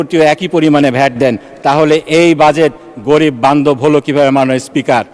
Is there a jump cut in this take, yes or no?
no